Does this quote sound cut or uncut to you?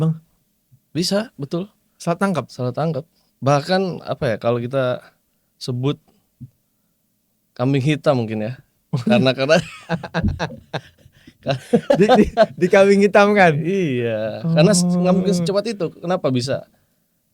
uncut